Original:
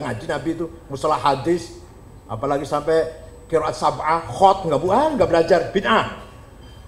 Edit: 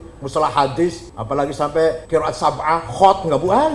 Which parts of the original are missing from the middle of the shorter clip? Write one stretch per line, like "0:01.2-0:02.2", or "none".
0:01.8-0:02.2
0:03.1-0:03.4